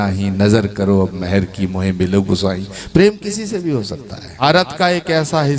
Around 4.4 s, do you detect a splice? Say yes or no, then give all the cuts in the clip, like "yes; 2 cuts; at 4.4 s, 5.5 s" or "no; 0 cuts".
yes; 1 cut; at 4.4 s